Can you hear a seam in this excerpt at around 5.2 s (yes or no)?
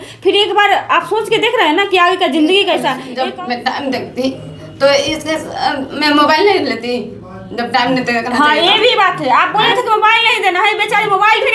no